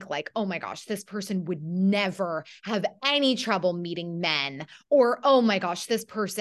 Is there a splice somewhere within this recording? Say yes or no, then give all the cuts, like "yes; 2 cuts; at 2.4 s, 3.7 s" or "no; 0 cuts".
no; 0 cuts